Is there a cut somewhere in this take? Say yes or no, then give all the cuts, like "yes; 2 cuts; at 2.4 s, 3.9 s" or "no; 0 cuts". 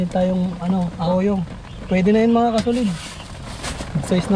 yes; 1 cut; at 1.0 s